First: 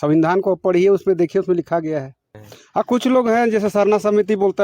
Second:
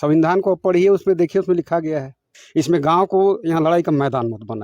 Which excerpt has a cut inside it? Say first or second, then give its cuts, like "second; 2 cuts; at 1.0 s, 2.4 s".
second; 1 cut; at 2.4 s